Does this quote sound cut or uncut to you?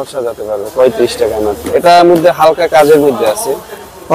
cut